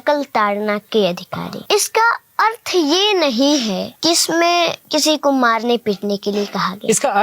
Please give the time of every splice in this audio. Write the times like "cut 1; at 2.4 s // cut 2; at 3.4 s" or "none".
cut 1; at 1.5 s // cut 2; at 3.9 s // cut 3; at 4.8 s